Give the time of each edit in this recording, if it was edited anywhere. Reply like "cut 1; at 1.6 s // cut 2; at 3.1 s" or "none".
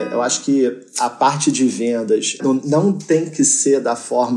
cut 1; at 1.1 s // cut 2; at 2.4 s